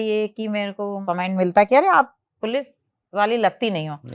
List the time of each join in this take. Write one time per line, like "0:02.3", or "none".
0:01.0